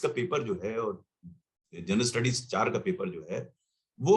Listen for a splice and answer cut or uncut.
uncut